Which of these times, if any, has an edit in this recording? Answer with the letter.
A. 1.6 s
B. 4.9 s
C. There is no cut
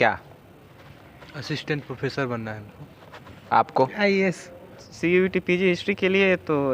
B